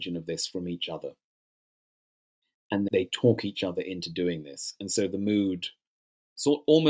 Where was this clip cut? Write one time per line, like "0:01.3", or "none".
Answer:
none